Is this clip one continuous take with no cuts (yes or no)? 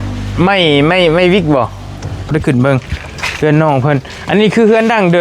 no